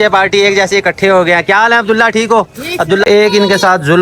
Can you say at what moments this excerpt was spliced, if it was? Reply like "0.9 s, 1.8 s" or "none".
3.0 s